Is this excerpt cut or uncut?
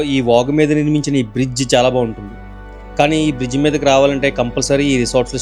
uncut